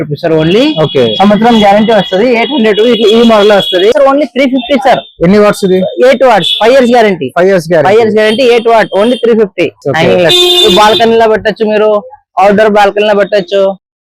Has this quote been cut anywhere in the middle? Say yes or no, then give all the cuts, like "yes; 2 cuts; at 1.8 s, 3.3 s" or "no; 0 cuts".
yes; 2 cuts; at 3.9 s, 9.8 s